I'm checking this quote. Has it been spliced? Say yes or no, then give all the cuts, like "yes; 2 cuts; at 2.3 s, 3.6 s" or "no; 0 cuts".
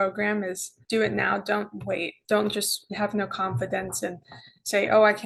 no; 0 cuts